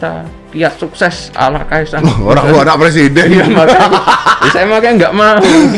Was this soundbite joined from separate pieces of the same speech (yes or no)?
no